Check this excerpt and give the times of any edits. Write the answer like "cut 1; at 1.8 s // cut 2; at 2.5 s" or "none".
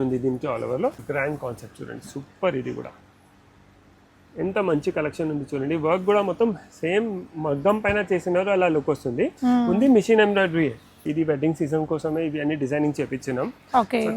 cut 1; at 1.0 s // cut 2; at 11.0 s

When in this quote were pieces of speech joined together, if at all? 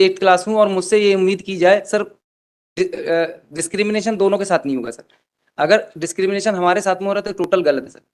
none

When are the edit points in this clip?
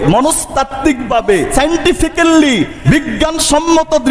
cut 1; at 1.5 s // cut 2; at 2.8 s

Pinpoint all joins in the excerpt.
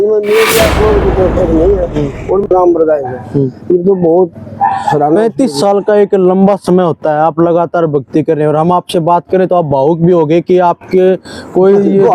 cut 1; at 2.5 s

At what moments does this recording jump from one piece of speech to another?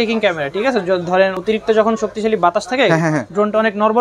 cut 1; at 1.4 s

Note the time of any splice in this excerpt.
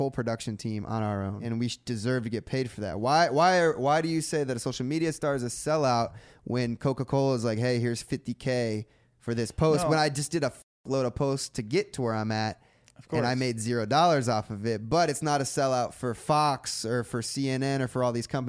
cut 1; at 1.4 s

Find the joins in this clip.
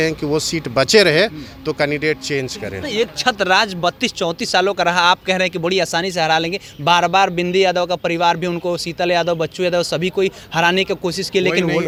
none

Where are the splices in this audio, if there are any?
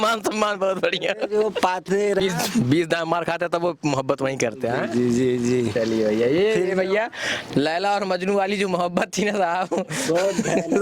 cut 1; at 2.2 s

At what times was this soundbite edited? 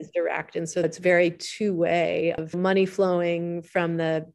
cut 1; at 2.5 s

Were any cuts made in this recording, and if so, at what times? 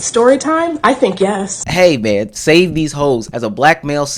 cut 1; at 1.6 s // cut 2; at 3.3 s

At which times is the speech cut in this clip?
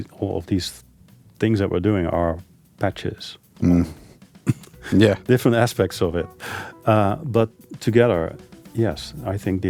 none

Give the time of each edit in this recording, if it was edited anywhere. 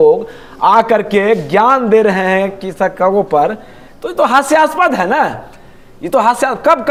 none

